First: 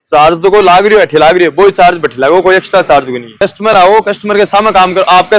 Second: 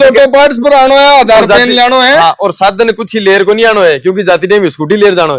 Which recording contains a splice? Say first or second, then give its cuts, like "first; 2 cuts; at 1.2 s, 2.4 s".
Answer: first; 1 cut; at 3.3 s